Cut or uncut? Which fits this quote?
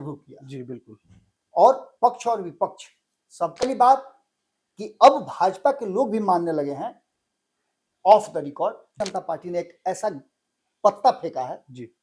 cut